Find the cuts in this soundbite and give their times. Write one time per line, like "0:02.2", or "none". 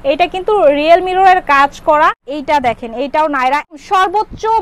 0:02.3
0:03.8

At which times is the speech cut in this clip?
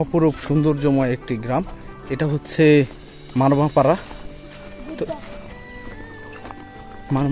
none

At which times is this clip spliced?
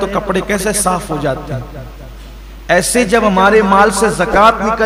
none

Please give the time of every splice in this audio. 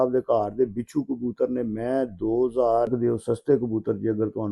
0:02.9

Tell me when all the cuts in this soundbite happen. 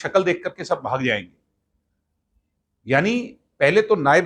none

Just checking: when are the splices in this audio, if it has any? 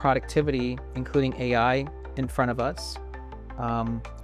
none

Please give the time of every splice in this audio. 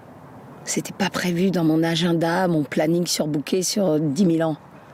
none

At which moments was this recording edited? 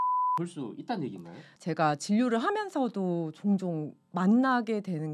0:01.5

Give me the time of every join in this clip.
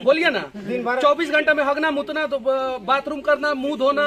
none

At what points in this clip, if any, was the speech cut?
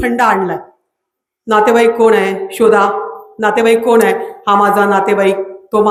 none

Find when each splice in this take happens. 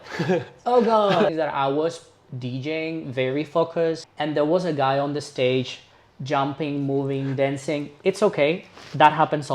0:01.3
0:04.1

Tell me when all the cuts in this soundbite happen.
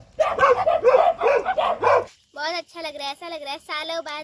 0:02.1

